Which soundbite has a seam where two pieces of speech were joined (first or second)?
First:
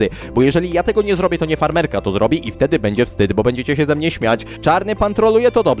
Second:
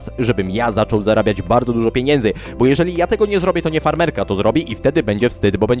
first